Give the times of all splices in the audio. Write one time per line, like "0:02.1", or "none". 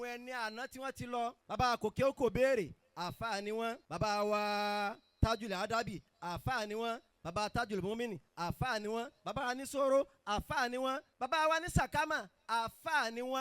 0:01.4
0:03.9
0:11.1

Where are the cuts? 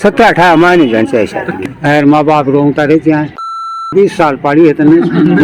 0:01.7
0:03.5

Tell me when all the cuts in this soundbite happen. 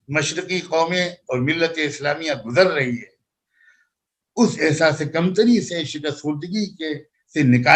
none

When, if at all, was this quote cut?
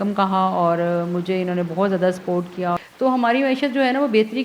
0:02.8

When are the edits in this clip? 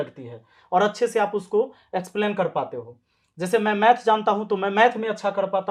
none

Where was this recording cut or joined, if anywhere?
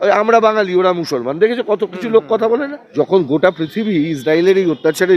0:02.8

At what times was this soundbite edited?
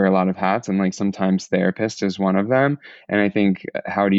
none

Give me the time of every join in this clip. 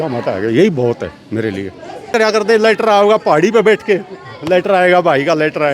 0:02.1

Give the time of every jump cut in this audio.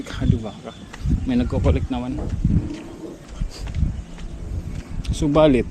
0:03.3

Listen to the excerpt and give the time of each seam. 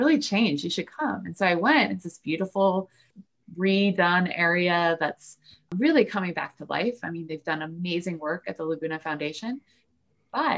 0:03.1

